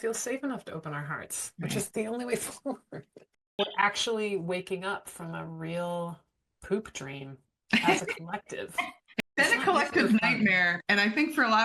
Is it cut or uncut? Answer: cut